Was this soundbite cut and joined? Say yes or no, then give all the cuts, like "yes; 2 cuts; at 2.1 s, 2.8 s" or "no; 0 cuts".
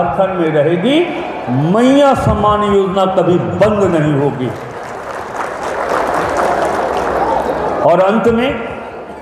no; 0 cuts